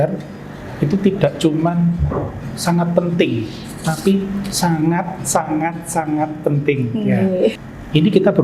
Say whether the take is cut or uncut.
cut